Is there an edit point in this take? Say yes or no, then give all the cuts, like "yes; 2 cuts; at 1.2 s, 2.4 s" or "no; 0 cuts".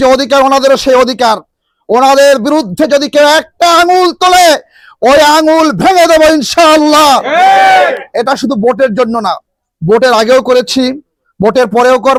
no; 0 cuts